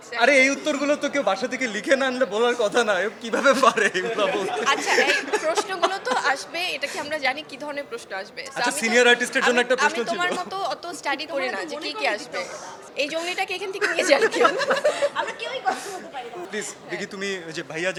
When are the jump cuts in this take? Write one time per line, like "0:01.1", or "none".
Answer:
none